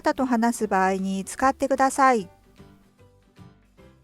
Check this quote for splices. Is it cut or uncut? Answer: cut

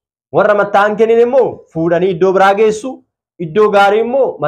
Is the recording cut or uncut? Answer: uncut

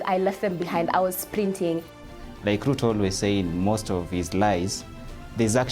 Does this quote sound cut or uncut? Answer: cut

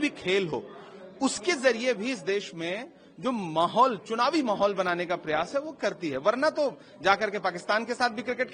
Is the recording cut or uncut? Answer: uncut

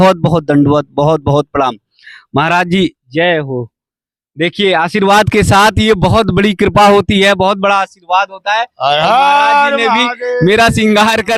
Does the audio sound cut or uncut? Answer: uncut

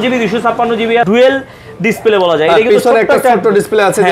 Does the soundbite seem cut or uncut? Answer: cut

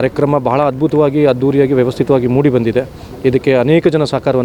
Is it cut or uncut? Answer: uncut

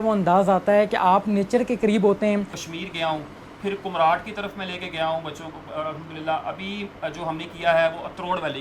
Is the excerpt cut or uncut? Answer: cut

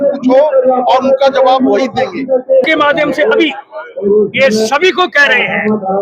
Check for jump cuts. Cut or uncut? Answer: cut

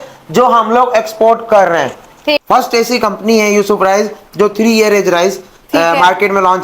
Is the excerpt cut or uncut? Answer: cut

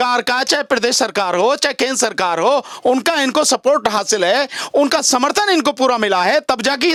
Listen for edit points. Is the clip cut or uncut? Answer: uncut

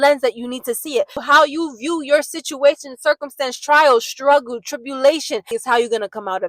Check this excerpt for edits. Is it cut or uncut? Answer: cut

